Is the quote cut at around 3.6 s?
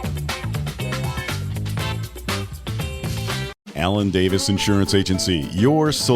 yes; 1 cut; at 3.6 s

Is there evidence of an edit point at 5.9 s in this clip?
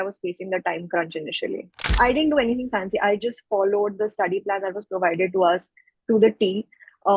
no; 1 cut; at 1.9 s

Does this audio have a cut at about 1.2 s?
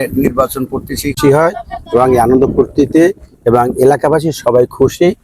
yes; 1 cut; at 1.2 s

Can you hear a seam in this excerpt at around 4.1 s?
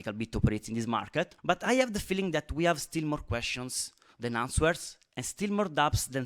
no; 1 cut; at 1.4 s

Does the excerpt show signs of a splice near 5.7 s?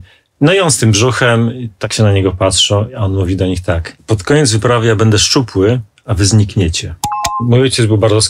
no; 2 cuts; at 1.9 s, 7.4 s

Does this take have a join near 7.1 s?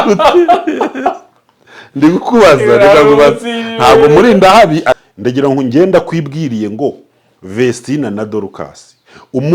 no; 1 cut; at 5.0 s

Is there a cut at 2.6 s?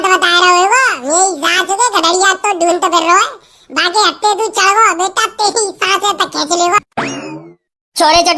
no; 1 cut; at 6.8 s

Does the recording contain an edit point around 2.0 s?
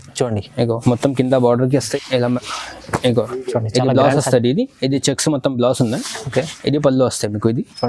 yes; 1 cut; at 2.0 s

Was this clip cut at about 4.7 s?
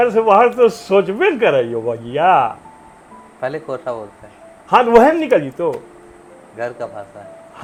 no; 0 cuts

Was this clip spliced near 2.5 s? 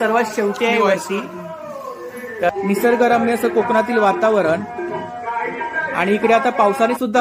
yes; 1 cut; at 2.5 s

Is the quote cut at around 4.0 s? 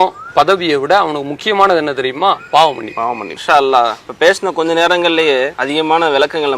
yes; 3 cuts; at 3.3 s, 4.0 s, 5.6 s

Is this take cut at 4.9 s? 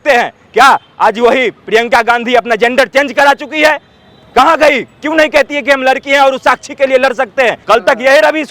no; 1 cut; at 7.6 s

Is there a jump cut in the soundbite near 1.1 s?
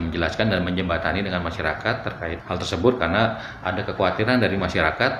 no; 1 cut; at 2.4 s

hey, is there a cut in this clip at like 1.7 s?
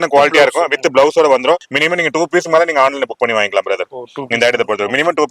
yes; 1 cut; at 1.7 s

